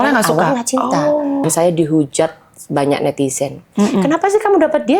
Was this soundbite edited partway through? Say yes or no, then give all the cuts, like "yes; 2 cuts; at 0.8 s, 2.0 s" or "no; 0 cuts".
yes; 1 cut; at 1.4 s